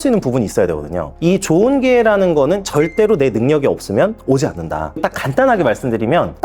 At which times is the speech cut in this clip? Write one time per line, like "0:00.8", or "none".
0:01.1
0:05.0